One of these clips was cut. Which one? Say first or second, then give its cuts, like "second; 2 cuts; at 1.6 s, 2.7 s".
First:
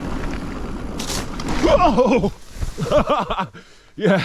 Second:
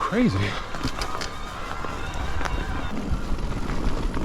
second; 1 cut; at 2.9 s